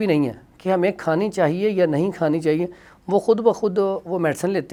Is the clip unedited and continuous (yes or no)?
yes